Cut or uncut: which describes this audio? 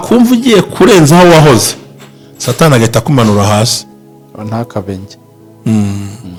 uncut